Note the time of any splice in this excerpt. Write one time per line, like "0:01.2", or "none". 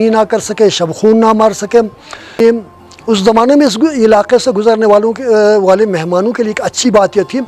0:02.4